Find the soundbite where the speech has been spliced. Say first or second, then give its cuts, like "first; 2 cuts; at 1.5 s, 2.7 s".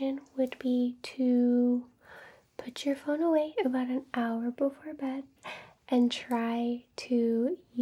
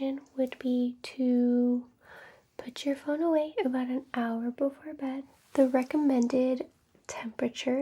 second; 1 cut; at 5.4 s